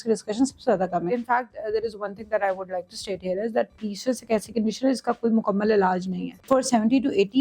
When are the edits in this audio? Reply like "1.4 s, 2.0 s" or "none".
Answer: 1.1 s, 6.4 s